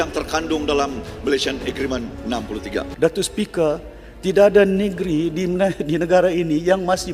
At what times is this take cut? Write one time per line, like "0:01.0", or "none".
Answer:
0:02.9